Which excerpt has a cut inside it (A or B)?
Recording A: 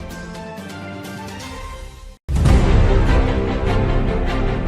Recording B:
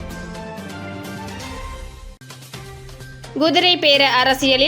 B